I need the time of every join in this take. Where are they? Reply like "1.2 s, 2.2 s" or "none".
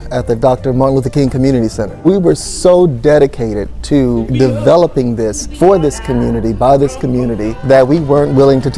1.9 s, 4.3 s, 5.4 s, 7.5 s